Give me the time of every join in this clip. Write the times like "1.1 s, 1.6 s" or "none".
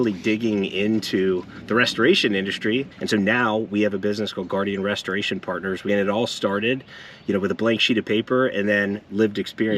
3.0 s, 5.9 s